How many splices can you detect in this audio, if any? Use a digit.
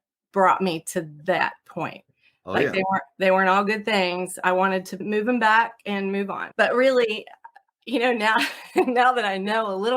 2